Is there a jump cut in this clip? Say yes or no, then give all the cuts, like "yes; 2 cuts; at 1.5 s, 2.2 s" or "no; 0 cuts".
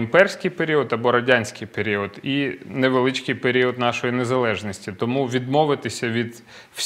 no; 0 cuts